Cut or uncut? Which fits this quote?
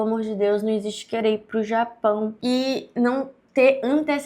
cut